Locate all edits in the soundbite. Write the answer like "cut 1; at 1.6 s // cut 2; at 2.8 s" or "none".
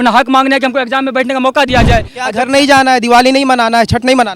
cut 1; at 2.2 s